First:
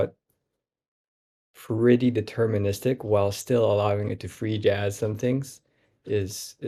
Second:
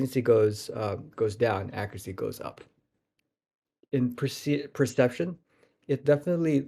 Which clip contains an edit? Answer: second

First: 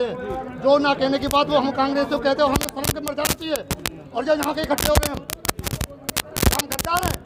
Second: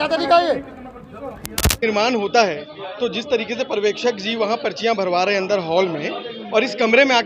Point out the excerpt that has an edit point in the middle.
second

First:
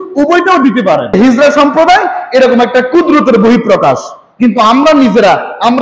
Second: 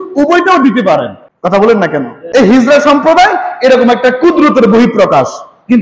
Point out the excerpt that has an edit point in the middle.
first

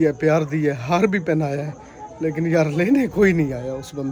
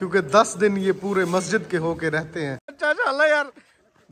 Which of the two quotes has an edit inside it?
second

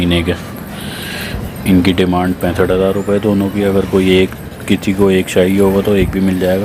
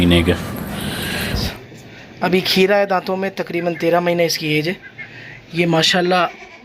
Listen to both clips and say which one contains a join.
second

